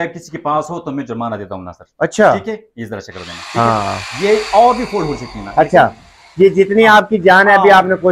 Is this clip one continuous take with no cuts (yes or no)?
yes